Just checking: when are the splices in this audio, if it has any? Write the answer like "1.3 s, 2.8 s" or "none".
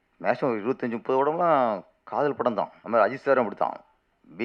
2.8 s